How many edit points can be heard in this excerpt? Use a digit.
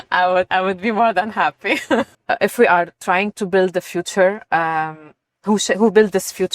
1